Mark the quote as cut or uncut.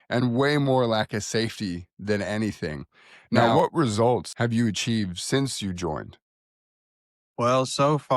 cut